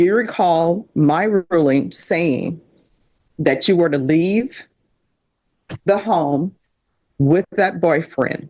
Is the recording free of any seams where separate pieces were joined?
yes; 0 cuts

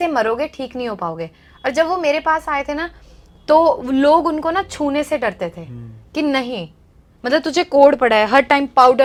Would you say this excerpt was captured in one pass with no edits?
yes; 0 cuts

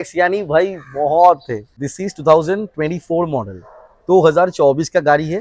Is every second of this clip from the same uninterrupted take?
no; 1 cut; at 1.9 s

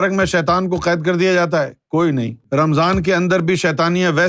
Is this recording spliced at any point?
yes; 1 cut; at 2.4 s

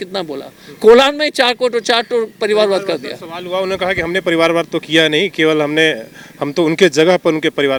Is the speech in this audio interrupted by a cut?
no; 0 cuts

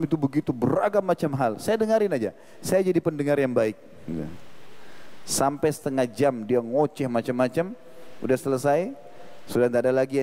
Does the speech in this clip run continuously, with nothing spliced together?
yes; 0 cuts

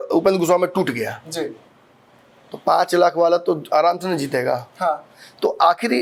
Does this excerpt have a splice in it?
no; 0 cuts

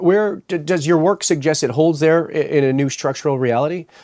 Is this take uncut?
yes; 0 cuts

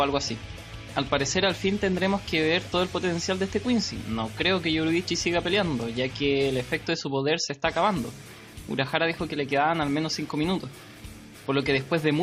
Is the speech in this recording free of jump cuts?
yes; 0 cuts

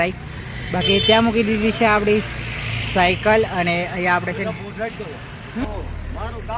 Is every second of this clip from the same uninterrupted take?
no; 1 cut; at 5.7 s

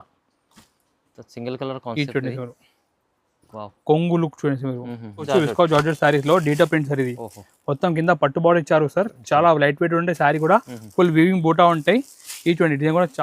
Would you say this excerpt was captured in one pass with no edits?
no; 1 cut; at 5.3 s

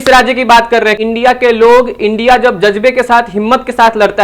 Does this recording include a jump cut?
yes; 1 cut; at 1.0 s

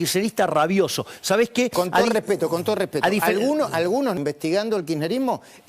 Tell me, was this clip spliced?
yes; 1 cut; at 4.2 s

